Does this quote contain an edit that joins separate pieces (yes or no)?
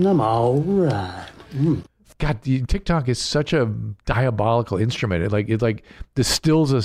yes